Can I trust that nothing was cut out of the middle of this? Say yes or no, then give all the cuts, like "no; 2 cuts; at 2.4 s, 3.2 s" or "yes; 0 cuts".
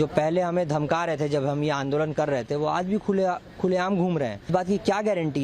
no; 1 cut; at 4.5 s